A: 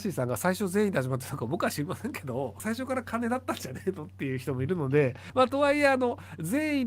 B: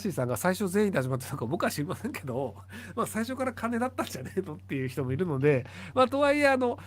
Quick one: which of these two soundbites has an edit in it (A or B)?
A